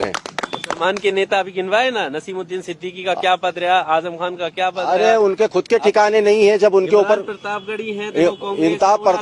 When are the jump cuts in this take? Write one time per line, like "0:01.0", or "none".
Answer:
none